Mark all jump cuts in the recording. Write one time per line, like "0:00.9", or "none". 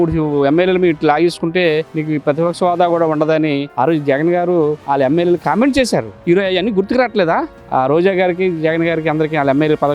0:01.9
0:03.7
0:04.8
0:06.1